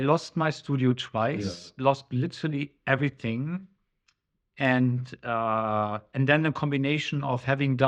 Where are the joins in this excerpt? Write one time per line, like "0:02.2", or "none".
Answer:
none

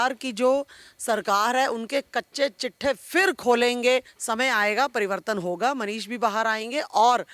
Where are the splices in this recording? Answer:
0:04.1

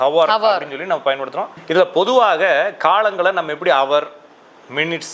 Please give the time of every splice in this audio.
0:01.6

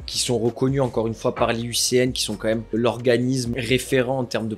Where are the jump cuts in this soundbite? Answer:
0:02.7
0:03.5

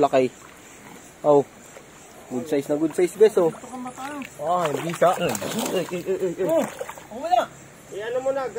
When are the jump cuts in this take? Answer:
none

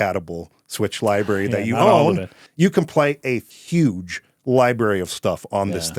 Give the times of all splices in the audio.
0:02.4
0:03.5

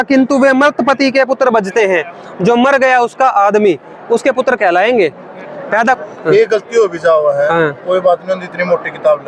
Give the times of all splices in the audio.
0:06.0

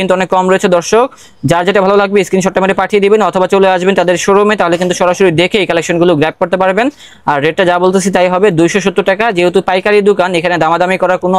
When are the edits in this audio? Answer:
none

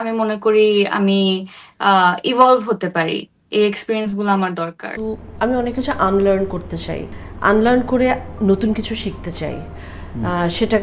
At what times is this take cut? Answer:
0:04.9

